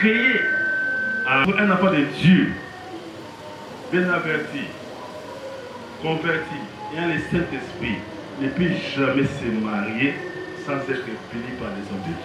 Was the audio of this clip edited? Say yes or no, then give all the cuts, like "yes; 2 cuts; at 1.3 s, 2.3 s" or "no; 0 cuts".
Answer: yes; 1 cut; at 1.5 s